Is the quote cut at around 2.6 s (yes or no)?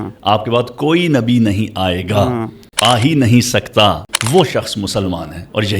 yes